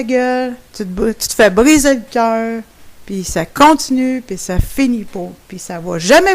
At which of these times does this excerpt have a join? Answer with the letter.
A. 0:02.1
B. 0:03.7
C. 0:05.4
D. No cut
A